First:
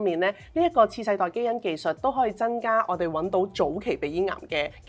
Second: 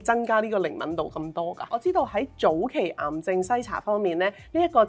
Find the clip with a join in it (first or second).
second